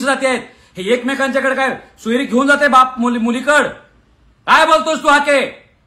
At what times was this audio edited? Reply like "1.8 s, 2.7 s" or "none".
none